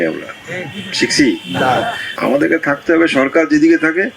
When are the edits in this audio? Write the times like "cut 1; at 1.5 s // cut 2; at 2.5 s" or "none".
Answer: cut 1; at 2.0 s